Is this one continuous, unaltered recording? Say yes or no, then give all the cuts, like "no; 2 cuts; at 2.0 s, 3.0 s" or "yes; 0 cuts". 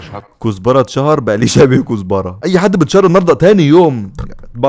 yes; 0 cuts